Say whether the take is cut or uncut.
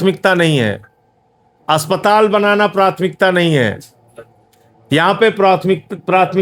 uncut